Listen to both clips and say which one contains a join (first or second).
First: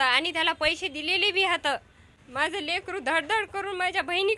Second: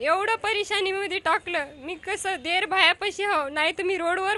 first